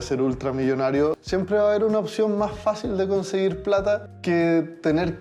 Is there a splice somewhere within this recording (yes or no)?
yes